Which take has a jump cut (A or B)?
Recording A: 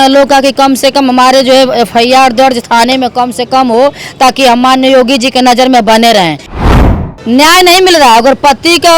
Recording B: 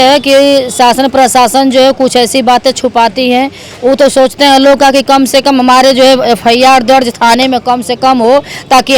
A